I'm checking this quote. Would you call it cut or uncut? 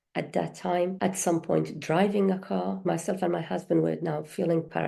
cut